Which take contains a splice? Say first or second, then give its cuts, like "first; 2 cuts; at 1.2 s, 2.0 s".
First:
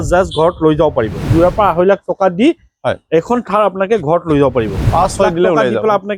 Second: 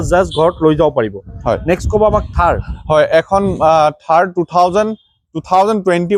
first; 2 cuts; at 1.3 s, 4.9 s